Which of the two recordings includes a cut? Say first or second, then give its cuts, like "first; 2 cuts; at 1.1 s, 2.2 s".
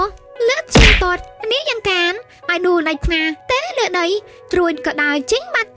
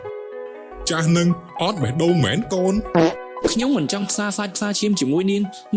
second; 1 cut; at 3.4 s